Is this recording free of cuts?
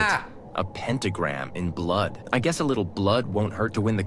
no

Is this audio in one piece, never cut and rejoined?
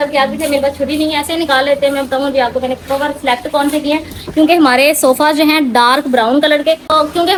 yes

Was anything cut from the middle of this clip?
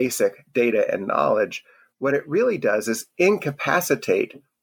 no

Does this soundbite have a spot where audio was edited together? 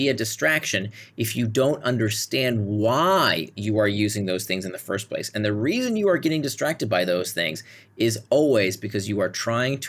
no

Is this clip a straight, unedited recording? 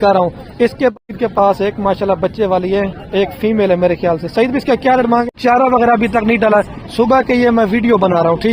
no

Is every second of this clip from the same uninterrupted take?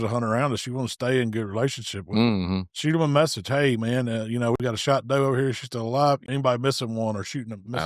no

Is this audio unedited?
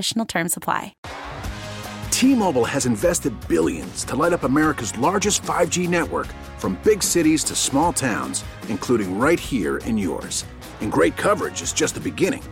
no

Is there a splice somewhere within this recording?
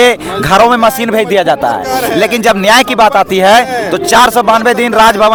no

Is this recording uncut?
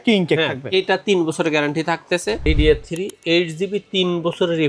no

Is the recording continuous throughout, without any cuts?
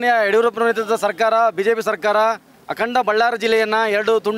yes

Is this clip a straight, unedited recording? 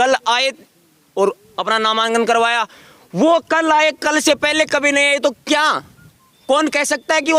yes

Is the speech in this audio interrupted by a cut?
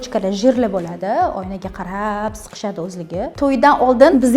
yes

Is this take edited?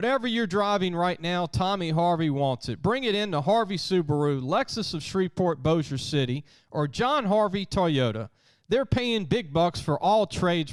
no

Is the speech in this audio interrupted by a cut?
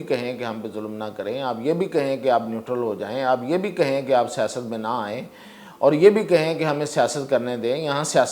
no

